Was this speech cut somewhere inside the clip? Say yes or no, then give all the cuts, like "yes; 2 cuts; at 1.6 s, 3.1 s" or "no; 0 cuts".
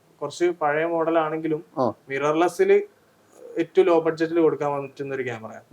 no; 0 cuts